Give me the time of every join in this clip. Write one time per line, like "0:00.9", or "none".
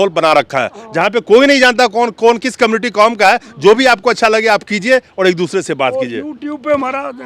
none